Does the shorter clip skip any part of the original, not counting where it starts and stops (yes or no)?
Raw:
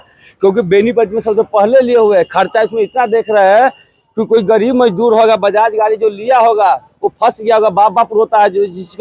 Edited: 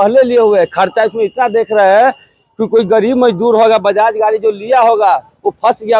no